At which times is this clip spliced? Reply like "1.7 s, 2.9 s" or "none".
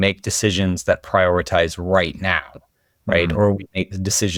none